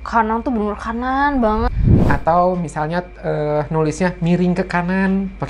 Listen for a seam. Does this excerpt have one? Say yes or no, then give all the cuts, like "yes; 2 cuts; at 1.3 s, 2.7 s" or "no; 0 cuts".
yes; 1 cut; at 1.7 s